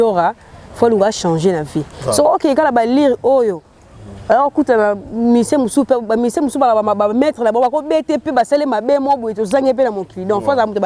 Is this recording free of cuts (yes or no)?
yes